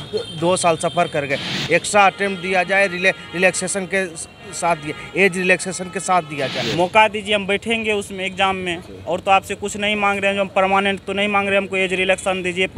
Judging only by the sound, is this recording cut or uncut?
cut